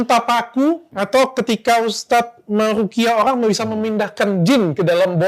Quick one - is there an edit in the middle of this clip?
yes; 1 cut; at 0.9 s

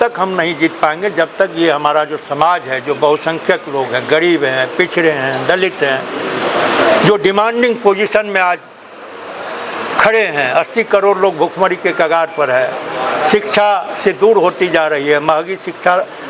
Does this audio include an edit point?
no; 0 cuts

